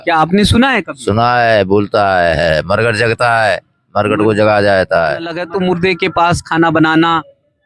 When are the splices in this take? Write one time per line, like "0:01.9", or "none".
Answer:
0:05.4